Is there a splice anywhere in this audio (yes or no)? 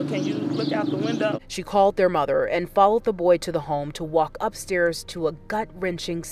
yes